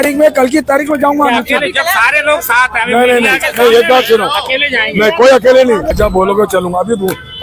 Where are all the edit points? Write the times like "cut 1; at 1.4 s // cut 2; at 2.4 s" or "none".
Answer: cut 1; at 5.9 s